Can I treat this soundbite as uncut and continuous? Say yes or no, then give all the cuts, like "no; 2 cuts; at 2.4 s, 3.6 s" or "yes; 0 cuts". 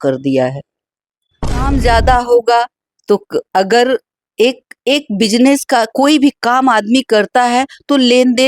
no; 1 cut; at 1.7 s